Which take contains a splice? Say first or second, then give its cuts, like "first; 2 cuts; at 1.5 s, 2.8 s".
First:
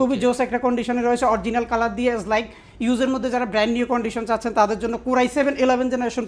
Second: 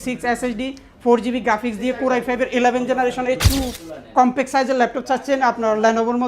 second; 1 cut; at 3.4 s